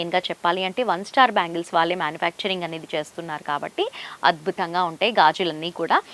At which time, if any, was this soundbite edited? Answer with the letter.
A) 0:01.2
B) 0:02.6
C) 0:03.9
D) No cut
D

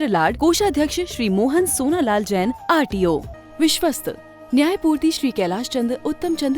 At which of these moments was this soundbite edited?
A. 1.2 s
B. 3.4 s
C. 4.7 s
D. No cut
B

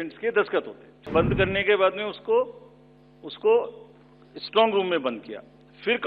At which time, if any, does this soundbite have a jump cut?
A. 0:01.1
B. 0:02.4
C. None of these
A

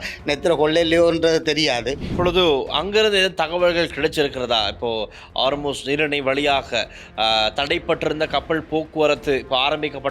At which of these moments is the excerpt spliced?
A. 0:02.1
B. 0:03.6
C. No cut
A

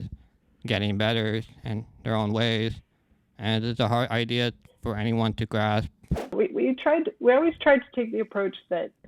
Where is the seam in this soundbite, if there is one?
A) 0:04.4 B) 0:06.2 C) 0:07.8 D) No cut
B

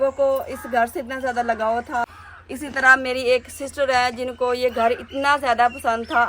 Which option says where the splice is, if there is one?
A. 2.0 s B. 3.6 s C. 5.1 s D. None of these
A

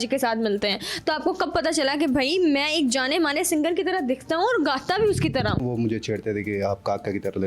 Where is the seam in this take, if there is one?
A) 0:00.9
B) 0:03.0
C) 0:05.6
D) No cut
C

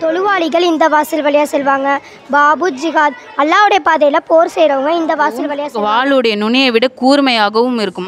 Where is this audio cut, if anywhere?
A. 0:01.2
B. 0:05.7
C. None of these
B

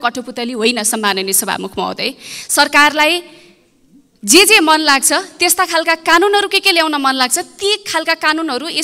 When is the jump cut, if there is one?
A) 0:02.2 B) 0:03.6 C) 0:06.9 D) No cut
D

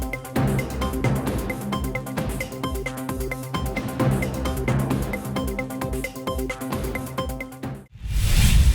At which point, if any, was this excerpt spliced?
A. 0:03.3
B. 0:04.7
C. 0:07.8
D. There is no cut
C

